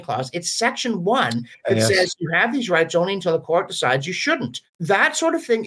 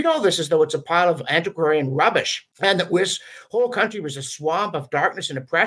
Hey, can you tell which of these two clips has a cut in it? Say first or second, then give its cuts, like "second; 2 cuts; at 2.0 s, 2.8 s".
second; 1 cut; at 2.4 s